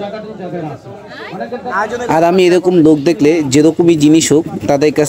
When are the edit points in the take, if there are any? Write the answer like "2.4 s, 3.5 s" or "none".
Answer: none

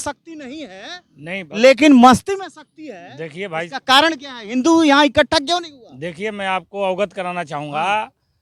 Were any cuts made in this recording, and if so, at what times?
none

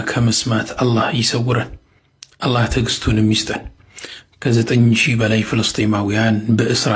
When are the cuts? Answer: none

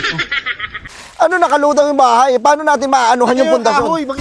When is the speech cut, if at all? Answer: 1.0 s

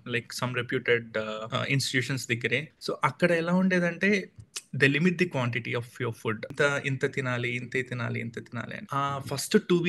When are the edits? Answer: 1.4 s, 2.7 s, 6.5 s, 8.8 s

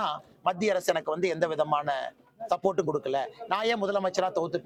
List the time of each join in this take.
none

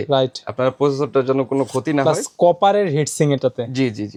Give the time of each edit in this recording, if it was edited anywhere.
none

